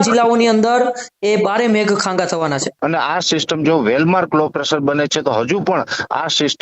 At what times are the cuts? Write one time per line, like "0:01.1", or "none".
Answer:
0:02.7